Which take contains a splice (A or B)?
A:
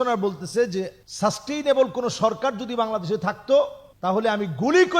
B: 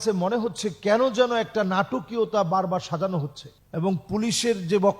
A